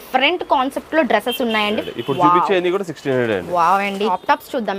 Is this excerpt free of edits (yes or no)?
no